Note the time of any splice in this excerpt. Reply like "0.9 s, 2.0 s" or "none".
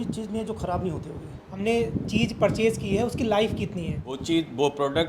1.5 s, 4.1 s